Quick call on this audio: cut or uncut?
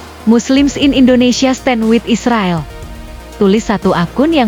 uncut